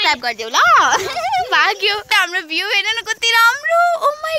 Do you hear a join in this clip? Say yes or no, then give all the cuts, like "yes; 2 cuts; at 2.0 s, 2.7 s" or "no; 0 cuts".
yes; 1 cut; at 2.1 s